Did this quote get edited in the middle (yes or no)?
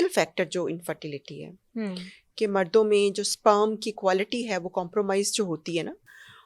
no